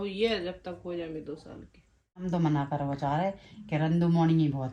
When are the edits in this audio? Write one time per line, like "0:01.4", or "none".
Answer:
0:02.2

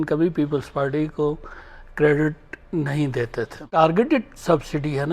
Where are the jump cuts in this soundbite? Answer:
0:03.8

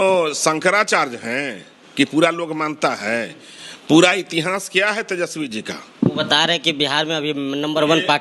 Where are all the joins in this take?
none

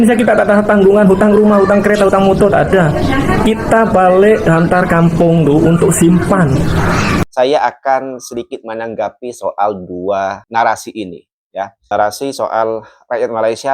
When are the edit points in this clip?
0:07.2

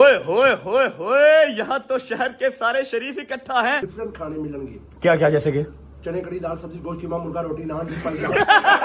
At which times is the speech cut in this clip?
0:03.8

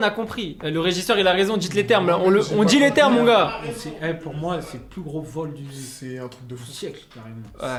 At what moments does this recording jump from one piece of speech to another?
none

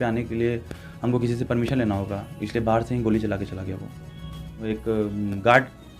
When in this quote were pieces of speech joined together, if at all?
0:04.6

